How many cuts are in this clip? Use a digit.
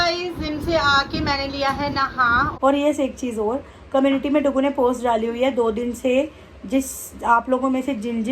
1